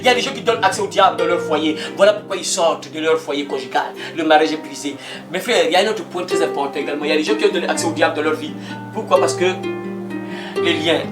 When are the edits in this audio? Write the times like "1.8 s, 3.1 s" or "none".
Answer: none